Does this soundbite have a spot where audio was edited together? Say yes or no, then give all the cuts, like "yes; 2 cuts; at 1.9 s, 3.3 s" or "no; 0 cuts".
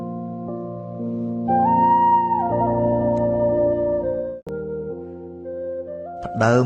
yes; 1 cut; at 4.2 s